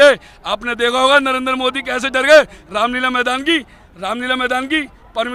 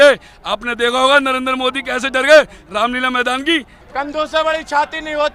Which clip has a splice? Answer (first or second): second